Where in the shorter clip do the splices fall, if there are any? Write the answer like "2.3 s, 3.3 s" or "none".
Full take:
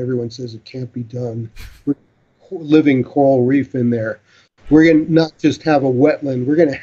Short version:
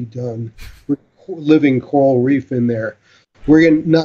1.1 s